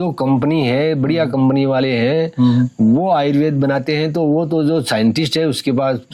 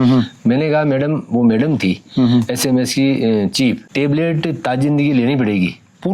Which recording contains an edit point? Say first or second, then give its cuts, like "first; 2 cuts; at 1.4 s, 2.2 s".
second; 1 cut; at 3.9 s